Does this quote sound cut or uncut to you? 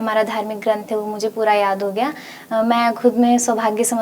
uncut